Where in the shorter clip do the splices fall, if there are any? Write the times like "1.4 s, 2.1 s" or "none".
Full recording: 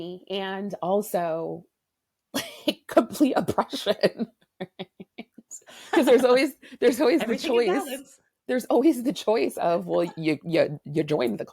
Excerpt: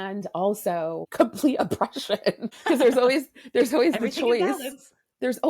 1.1 s, 2.5 s

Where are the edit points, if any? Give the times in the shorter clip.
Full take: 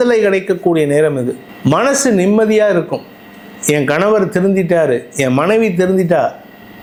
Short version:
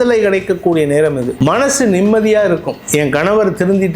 1.3 s, 2.8 s

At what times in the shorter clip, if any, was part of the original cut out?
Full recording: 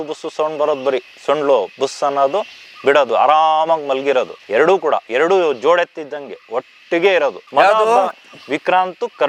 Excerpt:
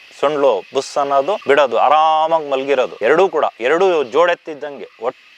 1.4 s, 2.9 s

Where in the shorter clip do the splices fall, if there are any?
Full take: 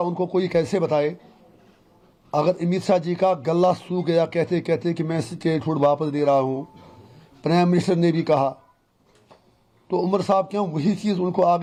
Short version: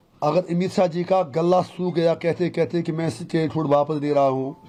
none

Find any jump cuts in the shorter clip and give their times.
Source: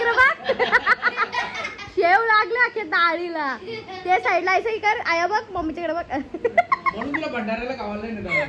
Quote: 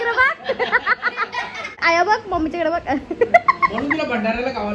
1.8 s

